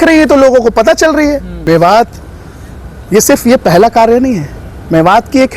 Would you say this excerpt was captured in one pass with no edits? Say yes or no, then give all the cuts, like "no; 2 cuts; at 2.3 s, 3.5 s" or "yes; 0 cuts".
no; 1 cut; at 1.6 s